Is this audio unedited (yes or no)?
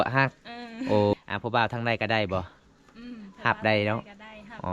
no